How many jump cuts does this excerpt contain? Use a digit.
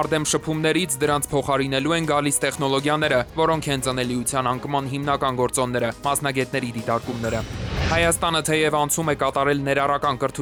0